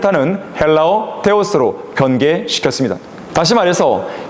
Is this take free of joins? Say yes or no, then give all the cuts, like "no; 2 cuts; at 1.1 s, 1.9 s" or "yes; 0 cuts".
no; 1 cut; at 3.1 s